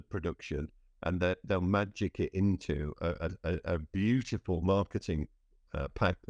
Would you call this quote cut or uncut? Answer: uncut